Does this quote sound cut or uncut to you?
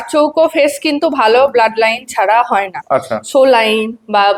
uncut